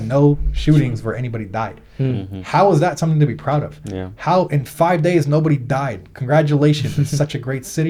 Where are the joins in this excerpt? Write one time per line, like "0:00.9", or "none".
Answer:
none